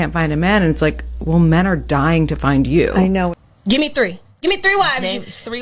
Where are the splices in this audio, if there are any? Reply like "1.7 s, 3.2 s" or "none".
3.3 s